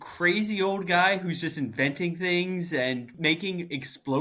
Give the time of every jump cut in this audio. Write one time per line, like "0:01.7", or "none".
0:03.1